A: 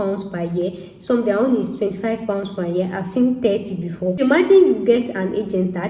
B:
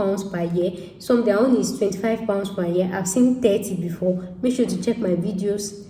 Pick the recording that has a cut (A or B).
A